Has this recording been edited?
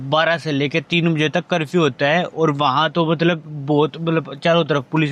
no; 0 cuts

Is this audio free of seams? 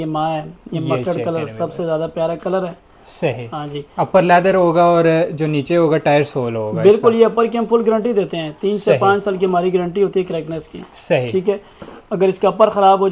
yes; 0 cuts

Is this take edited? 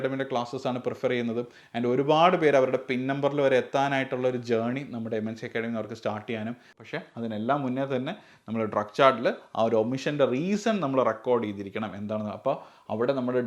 yes; 1 cut; at 6.7 s

